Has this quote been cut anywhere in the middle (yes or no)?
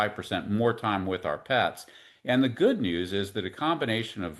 no